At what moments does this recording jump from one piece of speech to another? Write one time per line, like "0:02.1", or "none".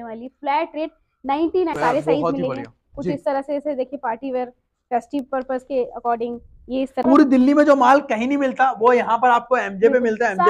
0:01.8
0:06.9